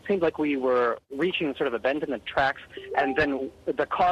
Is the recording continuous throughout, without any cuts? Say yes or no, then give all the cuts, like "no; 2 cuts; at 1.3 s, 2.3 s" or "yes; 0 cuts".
no; 1 cut; at 2.8 s